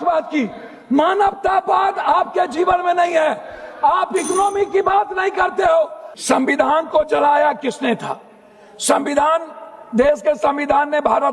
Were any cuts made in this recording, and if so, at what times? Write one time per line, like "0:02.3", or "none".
0:06.1